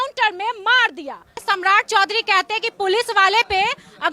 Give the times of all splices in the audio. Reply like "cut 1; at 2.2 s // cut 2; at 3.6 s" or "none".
cut 1; at 1.4 s